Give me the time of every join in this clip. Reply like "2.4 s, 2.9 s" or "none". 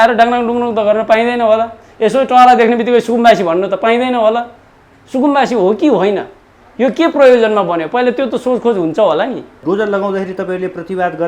none